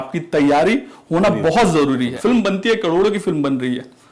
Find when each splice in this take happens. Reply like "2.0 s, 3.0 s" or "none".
2.1 s